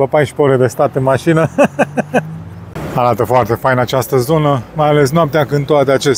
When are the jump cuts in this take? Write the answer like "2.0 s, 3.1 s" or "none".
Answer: 2.7 s